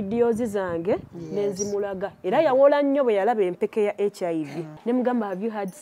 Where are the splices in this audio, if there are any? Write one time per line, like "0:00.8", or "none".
0:04.7